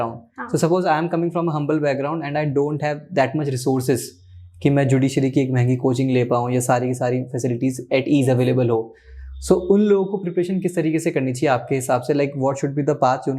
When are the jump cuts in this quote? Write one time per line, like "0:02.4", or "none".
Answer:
none